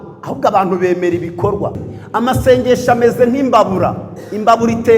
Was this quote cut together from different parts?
yes; 1 cut; at 1.8 s

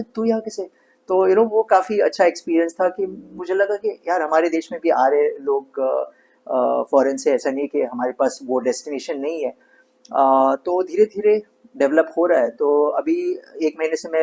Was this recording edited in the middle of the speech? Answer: no; 0 cuts

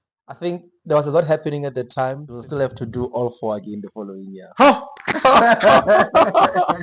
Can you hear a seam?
yes; 1 cut; at 2.3 s

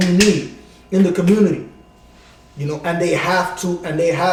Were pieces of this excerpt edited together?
no; 0 cuts

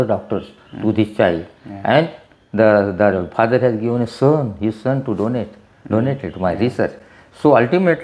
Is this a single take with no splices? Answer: yes; 0 cuts

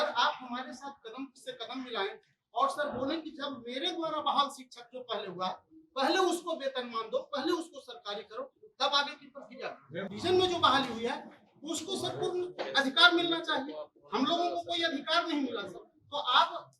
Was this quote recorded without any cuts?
no; 1 cut; at 10.1 s

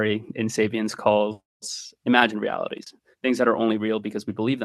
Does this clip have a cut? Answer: no; 0 cuts

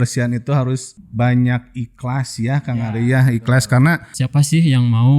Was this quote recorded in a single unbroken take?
no; 2 cuts; at 1.0 s, 4.1 s

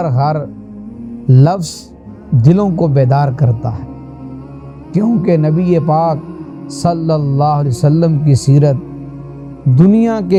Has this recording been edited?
no; 0 cuts

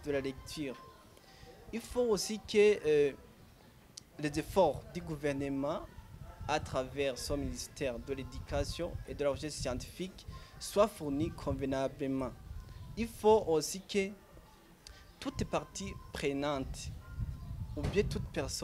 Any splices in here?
no; 0 cuts

